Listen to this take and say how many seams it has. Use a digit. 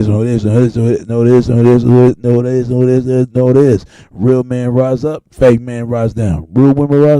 1